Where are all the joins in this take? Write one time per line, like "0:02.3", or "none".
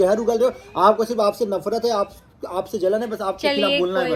none

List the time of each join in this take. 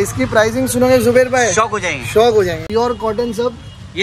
0:02.6

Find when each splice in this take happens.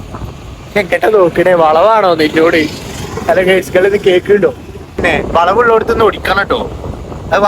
0:05.0

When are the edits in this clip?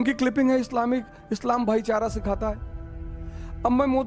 none

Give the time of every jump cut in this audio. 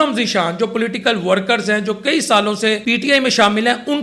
0:02.8

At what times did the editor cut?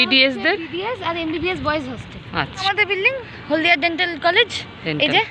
0:02.6

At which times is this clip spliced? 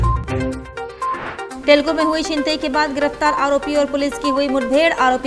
0:01.5

